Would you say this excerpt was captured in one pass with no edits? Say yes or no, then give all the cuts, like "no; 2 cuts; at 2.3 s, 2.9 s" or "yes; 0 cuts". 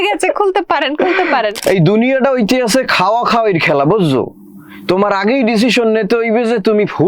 no; 1 cut; at 1.6 s